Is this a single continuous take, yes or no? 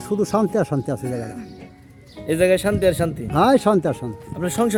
yes